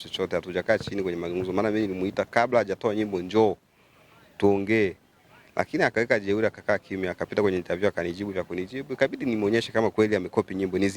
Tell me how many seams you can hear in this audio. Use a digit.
0